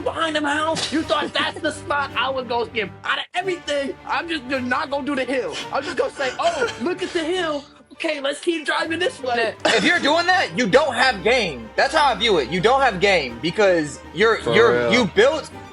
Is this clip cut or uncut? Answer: cut